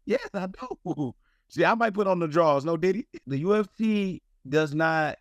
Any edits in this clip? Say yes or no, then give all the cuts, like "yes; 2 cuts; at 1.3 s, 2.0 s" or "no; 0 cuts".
yes; 1 cut; at 3.2 s